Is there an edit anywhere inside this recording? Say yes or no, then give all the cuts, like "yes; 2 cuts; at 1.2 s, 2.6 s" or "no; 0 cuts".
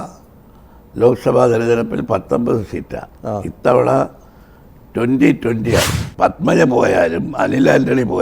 yes; 1 cut; at 5.9 s